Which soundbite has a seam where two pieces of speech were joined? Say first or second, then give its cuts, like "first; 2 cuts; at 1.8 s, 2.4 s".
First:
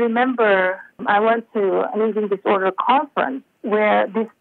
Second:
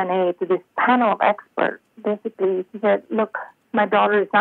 first; 1 cut; at 1.0 s